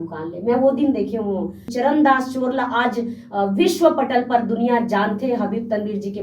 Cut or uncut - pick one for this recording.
cut